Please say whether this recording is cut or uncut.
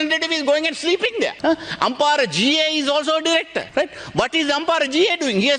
cut